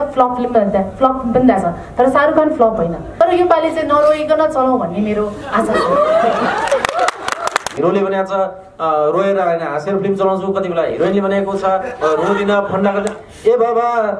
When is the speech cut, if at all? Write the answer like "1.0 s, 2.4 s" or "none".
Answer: 3.0 s, 7.7 s